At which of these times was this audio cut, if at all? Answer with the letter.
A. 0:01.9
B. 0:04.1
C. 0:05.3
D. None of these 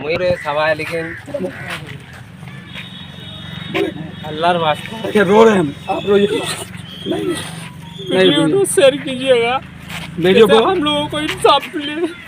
A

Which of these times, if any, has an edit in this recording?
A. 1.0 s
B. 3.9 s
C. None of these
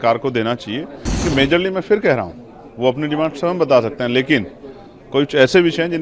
A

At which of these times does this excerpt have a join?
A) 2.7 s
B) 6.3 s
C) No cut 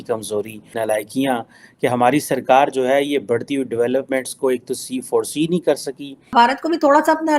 B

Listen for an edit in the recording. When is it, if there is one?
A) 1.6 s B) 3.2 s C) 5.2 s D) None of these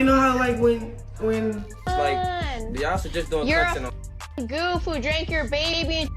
A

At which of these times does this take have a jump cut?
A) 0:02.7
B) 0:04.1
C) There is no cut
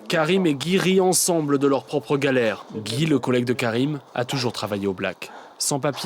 A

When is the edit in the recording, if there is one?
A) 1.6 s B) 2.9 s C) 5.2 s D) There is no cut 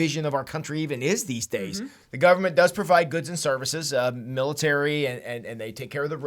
A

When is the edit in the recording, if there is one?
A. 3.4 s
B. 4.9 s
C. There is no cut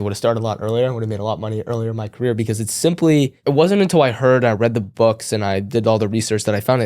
A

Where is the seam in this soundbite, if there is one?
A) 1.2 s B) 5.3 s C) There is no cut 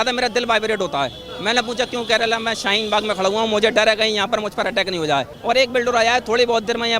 B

